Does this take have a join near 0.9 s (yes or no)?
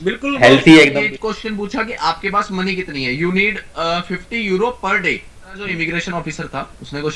yes